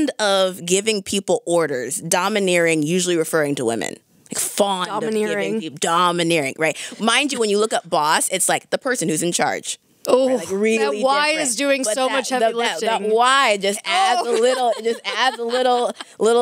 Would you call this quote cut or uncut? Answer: uncut